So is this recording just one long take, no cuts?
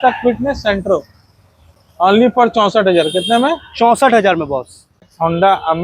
yes; 0 cuts

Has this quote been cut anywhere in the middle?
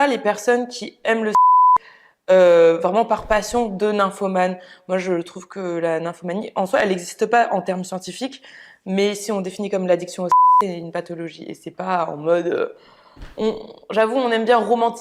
yes; 1 cut; at 1.8 s

